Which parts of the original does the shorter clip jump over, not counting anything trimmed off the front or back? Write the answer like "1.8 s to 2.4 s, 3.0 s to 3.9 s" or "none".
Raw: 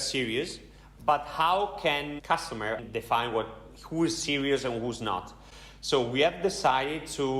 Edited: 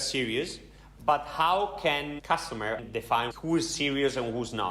3.3 s to 3.8 s

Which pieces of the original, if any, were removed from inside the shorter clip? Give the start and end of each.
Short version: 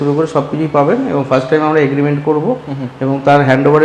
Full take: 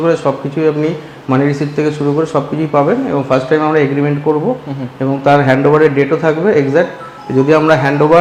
none

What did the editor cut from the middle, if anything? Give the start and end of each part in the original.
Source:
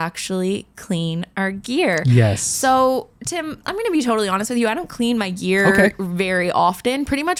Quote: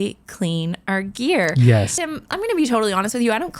2.5 s to 3.3 s

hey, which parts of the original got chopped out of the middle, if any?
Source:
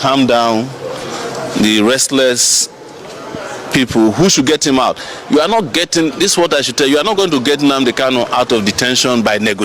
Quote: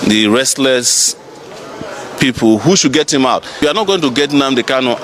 5.3 s to 7.0 s

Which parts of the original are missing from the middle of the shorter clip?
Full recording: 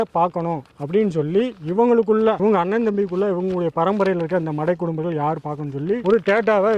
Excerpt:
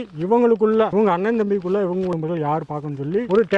3.6 s to 4.9 s

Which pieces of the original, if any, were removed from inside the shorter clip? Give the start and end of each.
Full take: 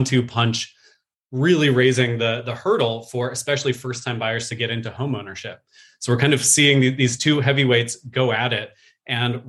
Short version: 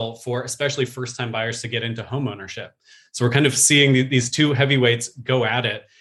none

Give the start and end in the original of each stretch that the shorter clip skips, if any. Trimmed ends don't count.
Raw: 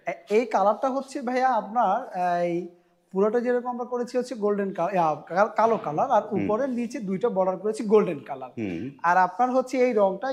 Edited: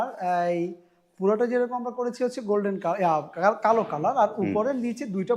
none

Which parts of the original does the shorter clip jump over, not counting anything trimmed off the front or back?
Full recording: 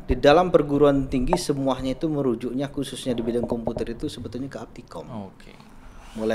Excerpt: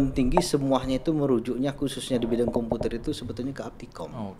none

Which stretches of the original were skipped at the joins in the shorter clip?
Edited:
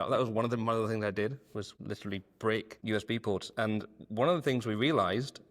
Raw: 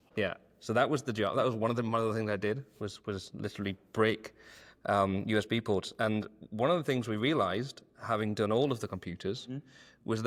3.0 s to 3.3 s, 4.4 s to 5.2 s

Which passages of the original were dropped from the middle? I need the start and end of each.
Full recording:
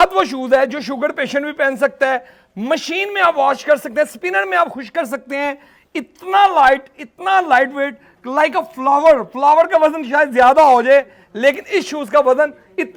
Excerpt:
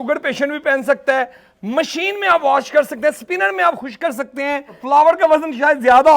5.7 s to 9.3 s

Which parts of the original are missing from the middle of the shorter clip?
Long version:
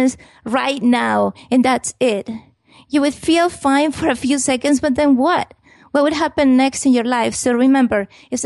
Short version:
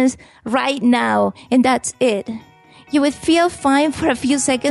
none

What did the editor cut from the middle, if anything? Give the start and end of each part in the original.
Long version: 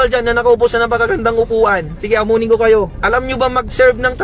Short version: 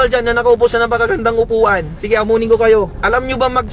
none

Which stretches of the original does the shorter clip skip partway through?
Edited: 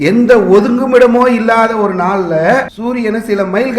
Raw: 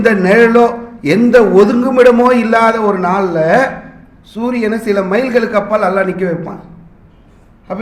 3.8 s to 4.3 s

